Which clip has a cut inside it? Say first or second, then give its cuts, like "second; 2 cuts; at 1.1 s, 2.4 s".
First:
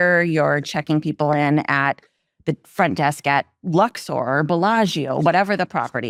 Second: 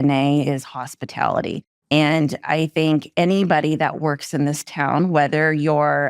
second; 1 cut; at 1.7 s